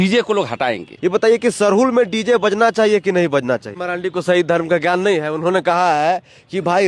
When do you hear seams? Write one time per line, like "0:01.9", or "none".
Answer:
0:00.9
0:03.9